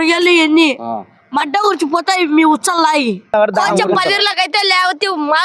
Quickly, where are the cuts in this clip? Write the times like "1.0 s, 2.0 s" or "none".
3.3 s

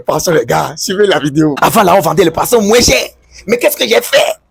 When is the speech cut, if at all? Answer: 1.6 s

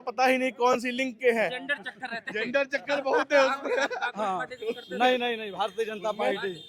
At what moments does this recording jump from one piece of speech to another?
none

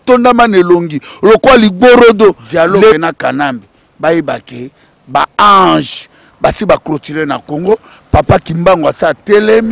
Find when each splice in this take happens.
2.9 s

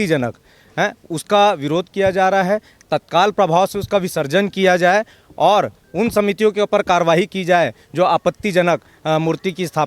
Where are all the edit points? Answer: none

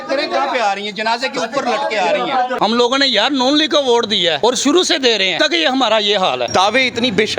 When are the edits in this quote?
2.6 s, 4.4 s, 5.3 s, 6.5 s

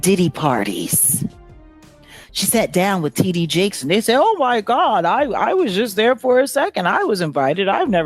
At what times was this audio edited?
none

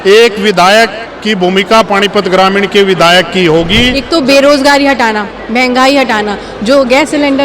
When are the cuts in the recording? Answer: 4.0 s

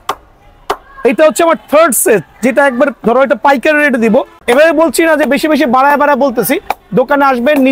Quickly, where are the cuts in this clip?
4.4 s

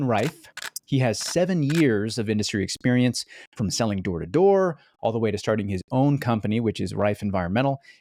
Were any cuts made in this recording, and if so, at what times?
none

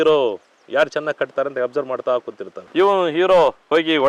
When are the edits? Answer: none

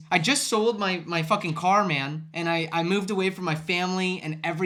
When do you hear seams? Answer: none

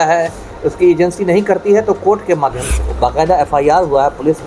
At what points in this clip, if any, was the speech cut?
2.8 s

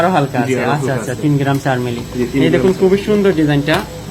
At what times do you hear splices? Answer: none

